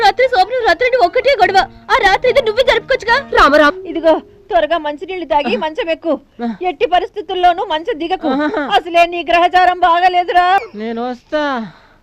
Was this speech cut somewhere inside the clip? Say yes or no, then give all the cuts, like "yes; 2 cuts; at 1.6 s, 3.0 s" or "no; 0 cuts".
yes; 2 cuts; at 3.7 s, 10.6 s